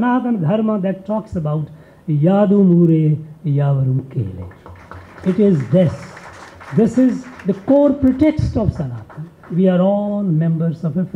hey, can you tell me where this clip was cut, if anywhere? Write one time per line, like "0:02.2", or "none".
none